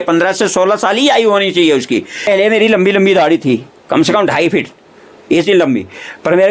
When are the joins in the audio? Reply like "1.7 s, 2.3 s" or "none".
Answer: 2.2 s